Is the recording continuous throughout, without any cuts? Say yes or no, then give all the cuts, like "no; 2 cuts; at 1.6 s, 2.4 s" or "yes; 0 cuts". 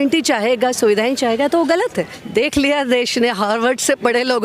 no; 1 cut; at 2.2 s